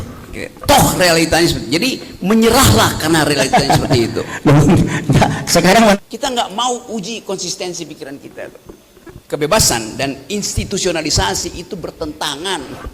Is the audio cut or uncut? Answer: cut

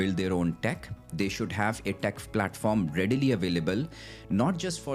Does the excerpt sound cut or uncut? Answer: uncut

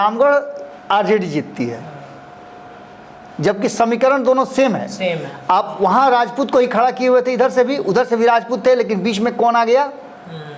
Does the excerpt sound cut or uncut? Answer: uncut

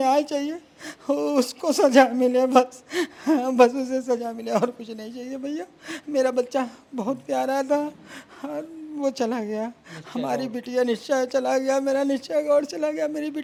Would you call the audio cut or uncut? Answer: uncut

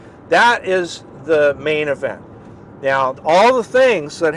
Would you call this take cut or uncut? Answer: cut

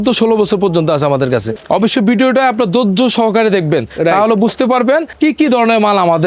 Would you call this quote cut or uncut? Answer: cut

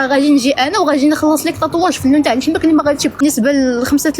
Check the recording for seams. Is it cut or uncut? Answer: cut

